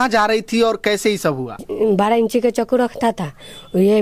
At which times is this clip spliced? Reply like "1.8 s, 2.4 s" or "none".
1.7 s